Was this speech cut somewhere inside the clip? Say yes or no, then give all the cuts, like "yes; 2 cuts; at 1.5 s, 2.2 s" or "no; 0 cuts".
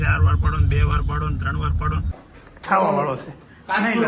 yes; 1 cut; at 2.2 s